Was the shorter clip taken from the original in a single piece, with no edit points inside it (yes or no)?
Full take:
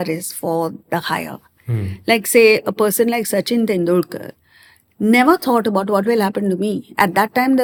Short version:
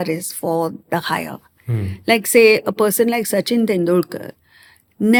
yes